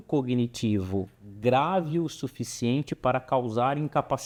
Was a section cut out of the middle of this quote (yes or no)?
no